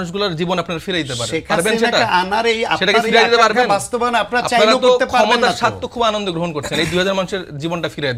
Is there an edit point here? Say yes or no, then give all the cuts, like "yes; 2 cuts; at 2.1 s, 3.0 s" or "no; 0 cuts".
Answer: no; 0 cuts